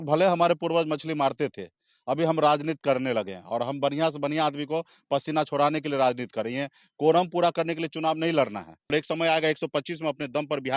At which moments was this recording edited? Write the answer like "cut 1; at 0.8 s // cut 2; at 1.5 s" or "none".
cut 1; at 8.9 s

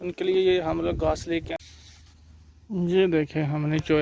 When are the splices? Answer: cut 1; at 1.6 s

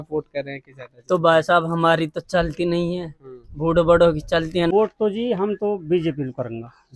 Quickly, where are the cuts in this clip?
cut 1; at 4.7 s

